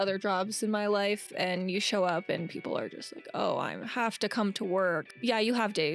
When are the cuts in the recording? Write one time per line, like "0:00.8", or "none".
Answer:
0:05.1